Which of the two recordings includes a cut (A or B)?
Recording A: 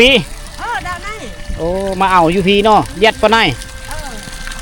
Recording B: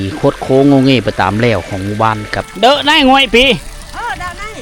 B